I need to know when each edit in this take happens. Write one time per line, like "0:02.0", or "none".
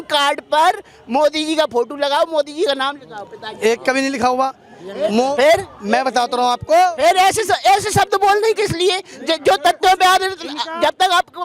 none